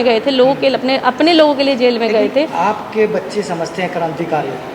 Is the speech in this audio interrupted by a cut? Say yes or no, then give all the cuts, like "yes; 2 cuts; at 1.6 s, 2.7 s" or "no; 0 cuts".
no; 0 cuts